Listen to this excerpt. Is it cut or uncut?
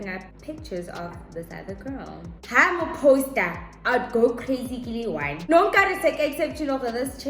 cut